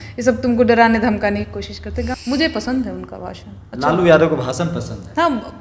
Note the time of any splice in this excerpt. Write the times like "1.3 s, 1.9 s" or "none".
2.1 s